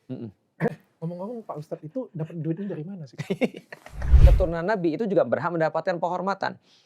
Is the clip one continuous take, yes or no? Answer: no